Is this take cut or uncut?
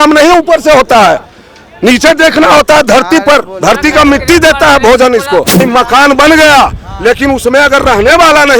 cut